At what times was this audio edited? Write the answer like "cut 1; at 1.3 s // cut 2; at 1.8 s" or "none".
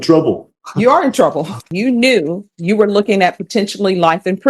cut 1; at 1.7 s